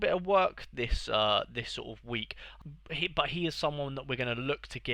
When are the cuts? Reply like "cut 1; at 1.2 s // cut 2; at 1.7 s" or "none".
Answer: cut 1; at 2.5 s